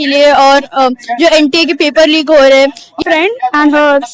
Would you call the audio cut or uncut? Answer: cut